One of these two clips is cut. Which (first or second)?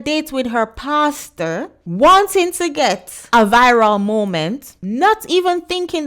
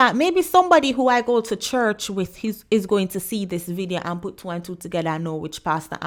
first